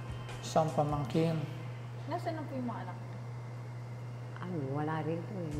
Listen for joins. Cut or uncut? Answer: uncut